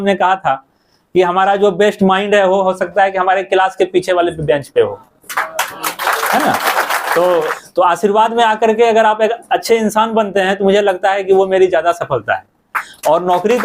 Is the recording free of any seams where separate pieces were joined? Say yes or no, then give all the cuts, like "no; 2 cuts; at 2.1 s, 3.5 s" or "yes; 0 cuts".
no; 1 cut; at 7.6 s